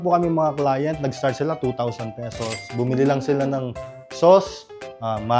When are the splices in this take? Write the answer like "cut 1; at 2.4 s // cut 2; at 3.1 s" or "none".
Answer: none